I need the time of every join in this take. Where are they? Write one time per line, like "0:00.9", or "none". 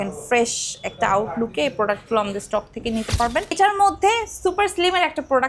0:03.5